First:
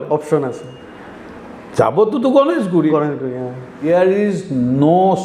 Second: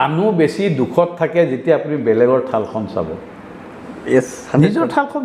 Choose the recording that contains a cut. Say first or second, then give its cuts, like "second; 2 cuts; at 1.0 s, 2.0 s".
first; 1 cut; at 3.9 s